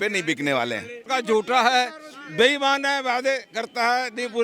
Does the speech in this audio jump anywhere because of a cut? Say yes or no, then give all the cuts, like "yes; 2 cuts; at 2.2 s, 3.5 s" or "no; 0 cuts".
yes; 1 cut; at 1.1 s